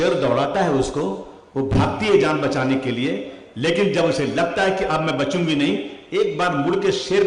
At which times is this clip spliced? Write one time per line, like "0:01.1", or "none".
none